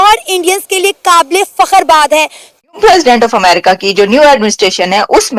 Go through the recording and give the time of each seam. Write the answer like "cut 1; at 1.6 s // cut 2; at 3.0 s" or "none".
cut 1; at 2.5 s